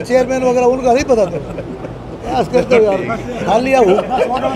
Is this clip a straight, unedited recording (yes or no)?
yes